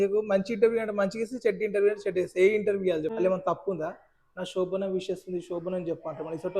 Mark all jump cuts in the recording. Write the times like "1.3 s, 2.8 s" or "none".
3.1 s